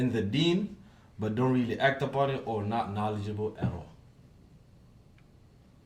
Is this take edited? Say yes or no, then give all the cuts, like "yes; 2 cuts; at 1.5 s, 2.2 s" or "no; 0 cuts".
no; 0 cuts